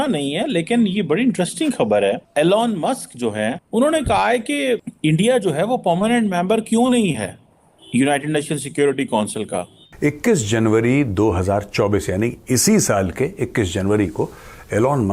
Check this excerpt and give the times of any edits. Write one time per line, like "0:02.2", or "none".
0:02.2
0:03.6
0:04.9
0:09.8